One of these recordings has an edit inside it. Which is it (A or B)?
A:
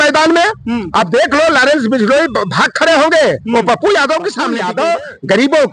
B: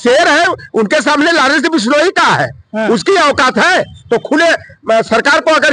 A